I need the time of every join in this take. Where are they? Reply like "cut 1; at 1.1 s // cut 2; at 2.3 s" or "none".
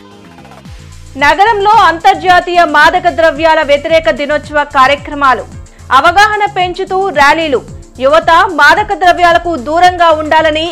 none